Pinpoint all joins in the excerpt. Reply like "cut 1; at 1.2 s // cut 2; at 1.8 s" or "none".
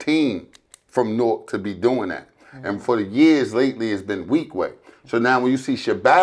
none